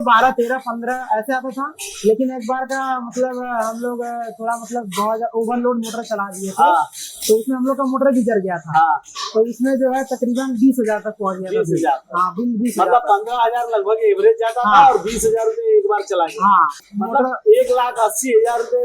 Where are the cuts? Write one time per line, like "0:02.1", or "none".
0:16.8